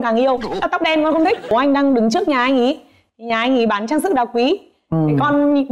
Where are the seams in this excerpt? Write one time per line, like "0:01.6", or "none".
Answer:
0:01.5

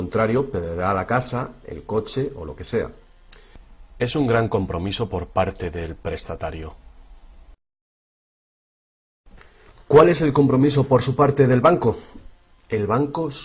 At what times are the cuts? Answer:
0:02.9

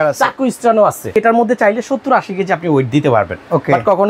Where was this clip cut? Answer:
0:01.1

